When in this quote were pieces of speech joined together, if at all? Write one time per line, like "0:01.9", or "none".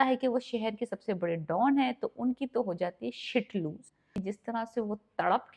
0:04.2